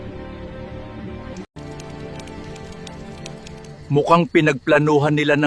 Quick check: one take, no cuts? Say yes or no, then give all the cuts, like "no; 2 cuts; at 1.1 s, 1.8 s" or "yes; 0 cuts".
no; 1 cut; at 1.5 s